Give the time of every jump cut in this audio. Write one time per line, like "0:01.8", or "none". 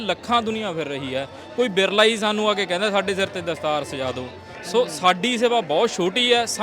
none